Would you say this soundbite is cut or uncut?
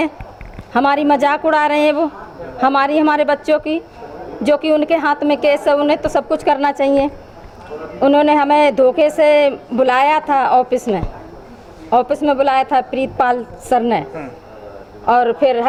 uncut